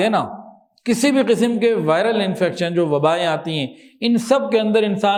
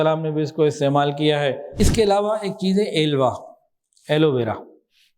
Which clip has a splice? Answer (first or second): second